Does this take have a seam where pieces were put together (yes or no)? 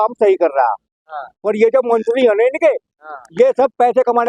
no